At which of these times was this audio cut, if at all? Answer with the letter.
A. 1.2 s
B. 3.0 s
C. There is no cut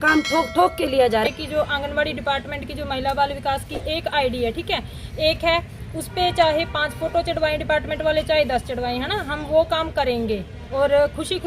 A